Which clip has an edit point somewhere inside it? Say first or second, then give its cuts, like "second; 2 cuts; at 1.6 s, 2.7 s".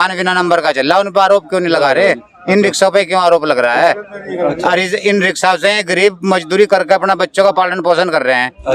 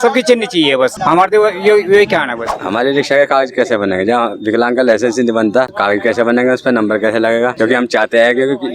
second; 4 cuts; at 1.0 s, 2.6 s, 5.7 s, 7.5 s